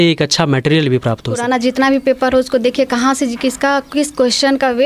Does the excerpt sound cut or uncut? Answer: cut